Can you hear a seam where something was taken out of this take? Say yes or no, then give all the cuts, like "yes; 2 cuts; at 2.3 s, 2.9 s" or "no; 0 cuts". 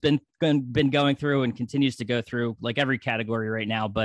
no; 0 cuts